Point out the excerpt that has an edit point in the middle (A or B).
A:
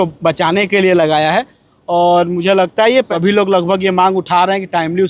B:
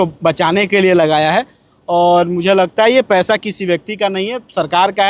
A